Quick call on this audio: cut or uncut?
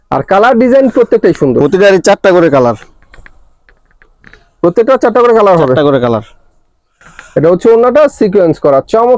uncut